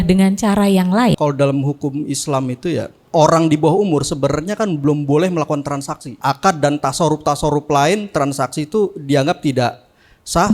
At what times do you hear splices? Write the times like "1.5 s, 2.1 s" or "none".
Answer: 1.2 s, 3.0 s, 6.0 s